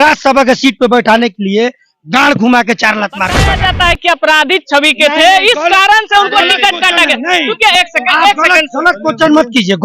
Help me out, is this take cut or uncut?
cut